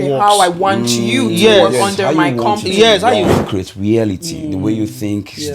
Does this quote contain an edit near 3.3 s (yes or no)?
yes